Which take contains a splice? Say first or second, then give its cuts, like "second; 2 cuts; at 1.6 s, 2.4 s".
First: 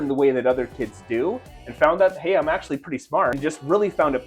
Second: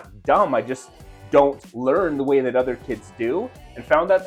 first; 1 cut; at 3.4 s